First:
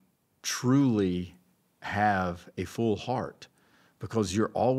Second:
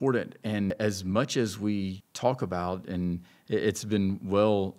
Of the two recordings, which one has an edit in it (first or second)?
second